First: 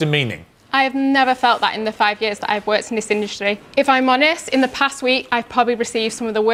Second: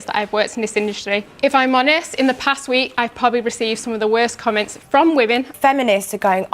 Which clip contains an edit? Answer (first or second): second